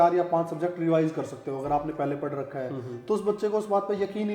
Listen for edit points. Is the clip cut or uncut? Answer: uncut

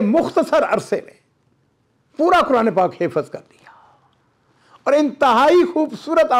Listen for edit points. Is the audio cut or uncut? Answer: uncut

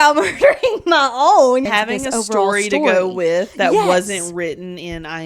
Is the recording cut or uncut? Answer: cut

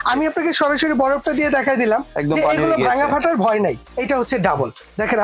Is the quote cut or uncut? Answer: cut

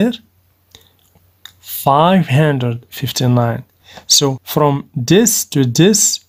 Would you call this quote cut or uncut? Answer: cut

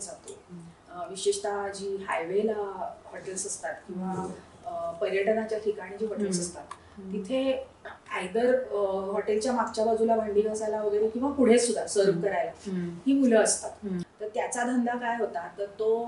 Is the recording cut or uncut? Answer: cut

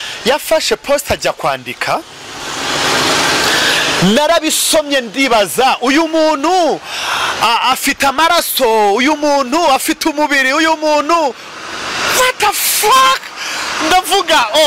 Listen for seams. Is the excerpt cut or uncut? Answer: uncut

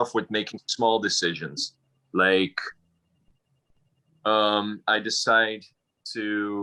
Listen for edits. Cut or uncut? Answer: uncut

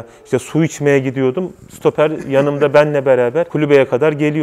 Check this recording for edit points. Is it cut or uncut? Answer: uncut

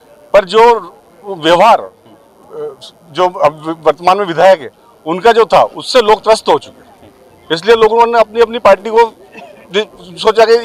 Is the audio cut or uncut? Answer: uncut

